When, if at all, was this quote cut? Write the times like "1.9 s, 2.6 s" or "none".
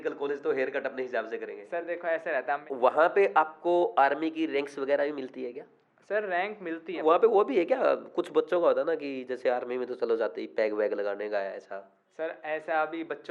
2.6 s, 7.0 s